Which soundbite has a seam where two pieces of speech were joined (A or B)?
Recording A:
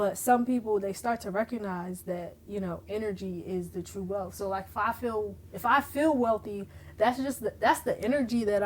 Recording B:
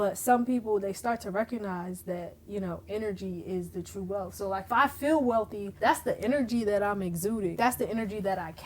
B